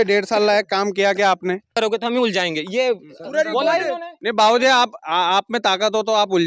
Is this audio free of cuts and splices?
no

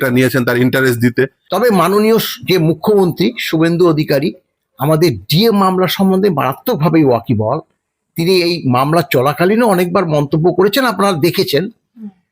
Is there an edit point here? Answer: yes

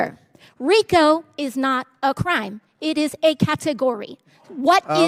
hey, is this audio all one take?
yes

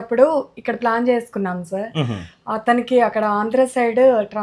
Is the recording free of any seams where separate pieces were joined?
yes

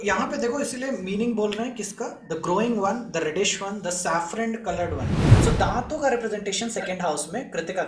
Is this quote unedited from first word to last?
no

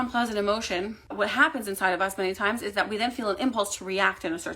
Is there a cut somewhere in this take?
yes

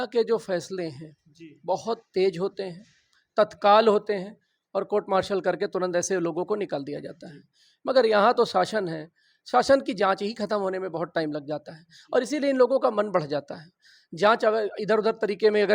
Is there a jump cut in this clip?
no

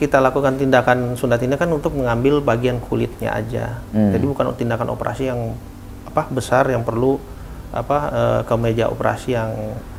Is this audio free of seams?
yes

